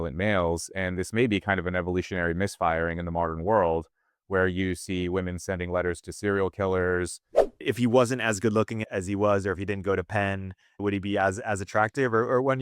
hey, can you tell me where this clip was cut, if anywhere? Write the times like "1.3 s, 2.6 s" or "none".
7.6 s, 8.8 s, 10.8 s